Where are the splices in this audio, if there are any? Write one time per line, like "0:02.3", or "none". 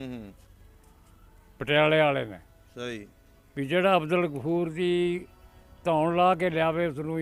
none